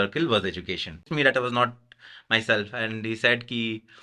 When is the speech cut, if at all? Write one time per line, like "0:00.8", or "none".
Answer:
0:01.1